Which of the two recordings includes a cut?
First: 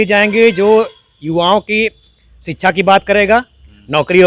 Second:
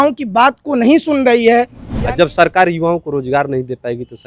second; 1 cut; at 1.8 s

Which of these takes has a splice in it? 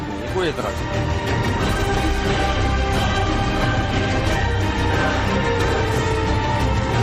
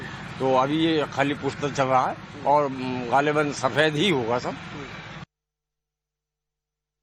first; 1 cut; at 5.6 s

